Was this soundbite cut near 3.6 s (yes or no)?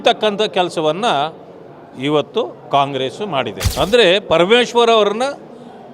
yes